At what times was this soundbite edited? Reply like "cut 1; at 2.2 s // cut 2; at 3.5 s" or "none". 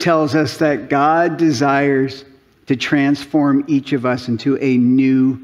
none